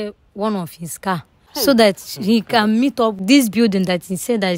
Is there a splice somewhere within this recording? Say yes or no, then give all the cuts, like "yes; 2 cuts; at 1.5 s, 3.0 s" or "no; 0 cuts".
yes; 2 cuts; at 1.4 s, 3.2 s